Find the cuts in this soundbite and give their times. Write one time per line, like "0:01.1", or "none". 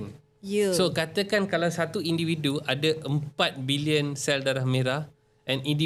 none